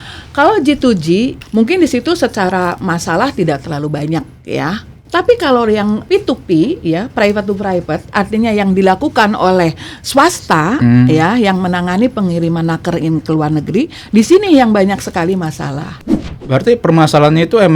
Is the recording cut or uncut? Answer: cut